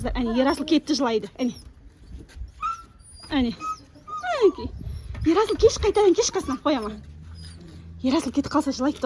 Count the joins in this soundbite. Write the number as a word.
zero